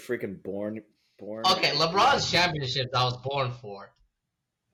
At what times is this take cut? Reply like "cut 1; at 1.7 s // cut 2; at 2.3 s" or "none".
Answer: none